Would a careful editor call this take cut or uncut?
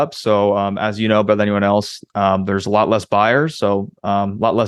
uncut